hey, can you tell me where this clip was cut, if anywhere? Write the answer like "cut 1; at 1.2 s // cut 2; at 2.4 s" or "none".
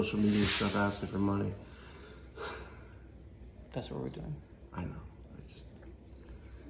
none

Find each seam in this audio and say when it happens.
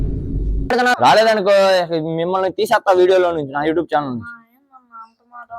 cut 1; at 0.9 s

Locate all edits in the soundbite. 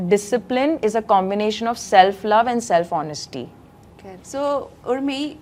none

